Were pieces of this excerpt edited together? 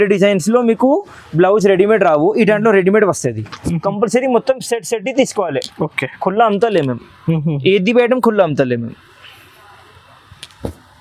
yes; 1 cut; at 3.6 s

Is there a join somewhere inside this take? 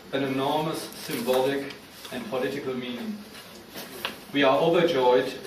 yes; 1 cut; at 1.2 s

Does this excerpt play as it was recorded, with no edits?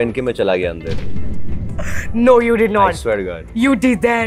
yes; 0 cuts

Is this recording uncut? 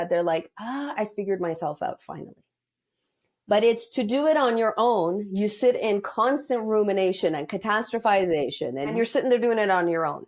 no; 1 cut; at 8.9 s

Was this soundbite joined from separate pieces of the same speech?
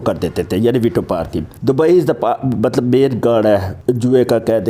yes; 2 cuts; at 1.4 s, 3.7 s

